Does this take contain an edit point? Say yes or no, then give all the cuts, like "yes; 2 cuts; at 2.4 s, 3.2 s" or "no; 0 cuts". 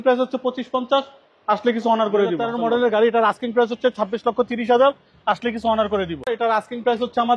yes; 2 cuts; at 2.5 s, 6.3 s